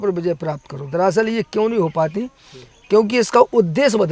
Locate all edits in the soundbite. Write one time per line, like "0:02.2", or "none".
none